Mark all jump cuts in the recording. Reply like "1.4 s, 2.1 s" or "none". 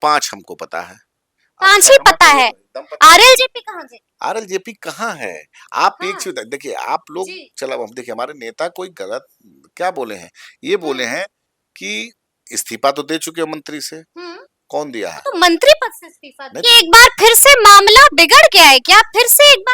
16.5 s